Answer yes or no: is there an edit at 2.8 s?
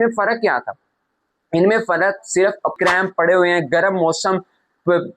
yes